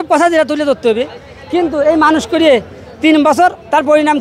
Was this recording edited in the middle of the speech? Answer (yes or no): no